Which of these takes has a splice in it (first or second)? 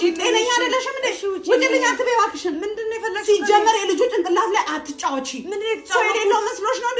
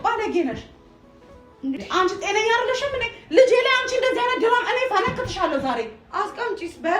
second